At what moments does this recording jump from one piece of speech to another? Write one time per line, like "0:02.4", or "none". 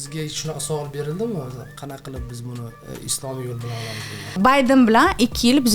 0:04.4